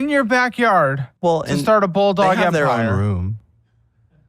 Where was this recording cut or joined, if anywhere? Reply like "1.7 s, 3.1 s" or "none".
2.2 s